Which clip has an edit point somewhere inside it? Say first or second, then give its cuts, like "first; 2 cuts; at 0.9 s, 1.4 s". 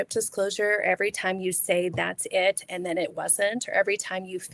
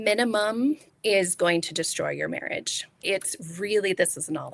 second; 2 cuts; at 0.9 s, 3.0 s